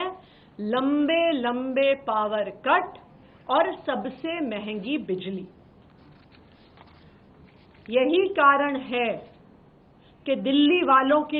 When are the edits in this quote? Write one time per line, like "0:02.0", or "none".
none